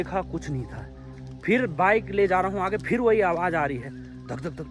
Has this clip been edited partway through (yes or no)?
no